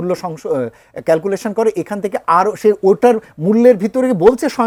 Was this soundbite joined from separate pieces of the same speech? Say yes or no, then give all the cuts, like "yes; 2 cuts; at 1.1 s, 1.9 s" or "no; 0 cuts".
no; 0 cuts